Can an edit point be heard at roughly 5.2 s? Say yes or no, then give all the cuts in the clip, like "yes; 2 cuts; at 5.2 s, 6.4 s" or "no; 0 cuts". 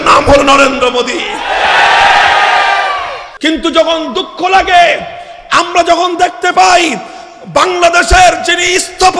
no; 1 cut; at 3.2 s